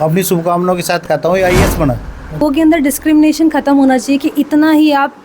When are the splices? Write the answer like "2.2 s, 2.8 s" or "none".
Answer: 2.4 s